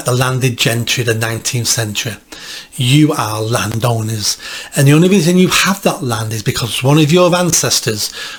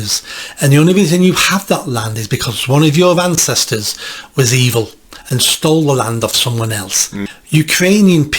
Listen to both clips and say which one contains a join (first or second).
second